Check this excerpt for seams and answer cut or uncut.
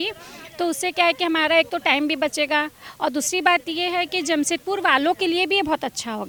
uncut